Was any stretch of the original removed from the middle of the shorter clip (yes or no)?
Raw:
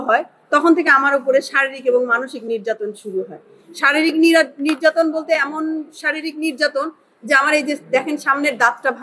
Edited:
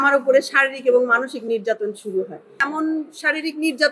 yes